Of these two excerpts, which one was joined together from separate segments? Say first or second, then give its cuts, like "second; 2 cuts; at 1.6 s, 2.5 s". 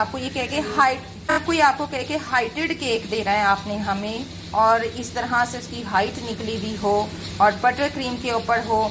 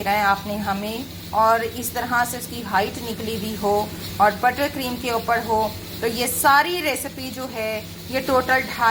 first; 1 cut; at 1.4 s